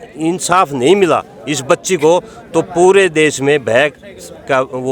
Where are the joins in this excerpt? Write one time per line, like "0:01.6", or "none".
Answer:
none